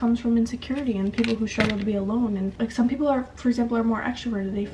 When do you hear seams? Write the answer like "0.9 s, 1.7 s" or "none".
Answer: none